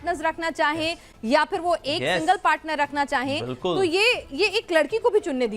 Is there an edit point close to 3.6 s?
no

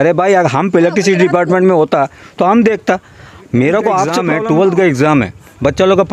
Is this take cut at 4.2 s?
yes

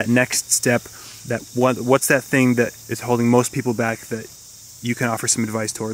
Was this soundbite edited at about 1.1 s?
no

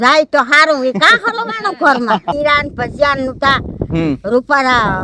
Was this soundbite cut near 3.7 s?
no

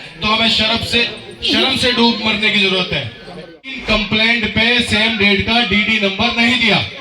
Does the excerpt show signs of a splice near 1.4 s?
no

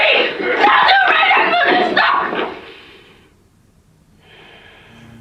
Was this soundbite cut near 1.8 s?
no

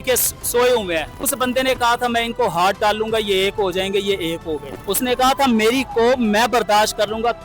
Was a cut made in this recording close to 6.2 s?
no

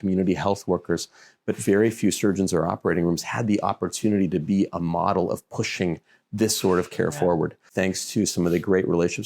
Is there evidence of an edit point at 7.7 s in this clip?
yes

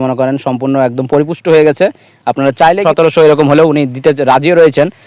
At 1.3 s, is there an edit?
no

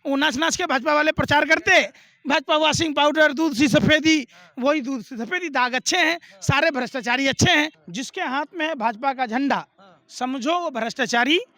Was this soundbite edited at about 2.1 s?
no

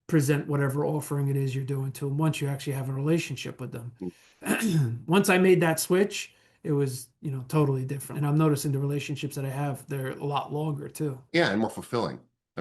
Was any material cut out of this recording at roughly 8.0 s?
yes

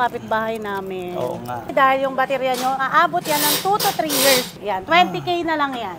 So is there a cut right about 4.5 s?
yes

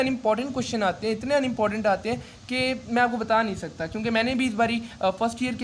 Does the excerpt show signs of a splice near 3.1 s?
no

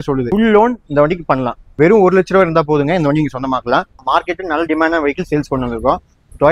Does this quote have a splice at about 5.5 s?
no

